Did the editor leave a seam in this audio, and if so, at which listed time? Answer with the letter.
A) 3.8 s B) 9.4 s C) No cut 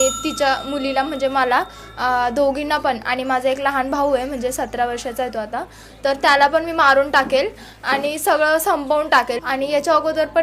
B